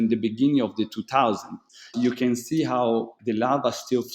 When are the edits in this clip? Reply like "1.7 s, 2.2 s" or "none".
1.9 s, 3.1 s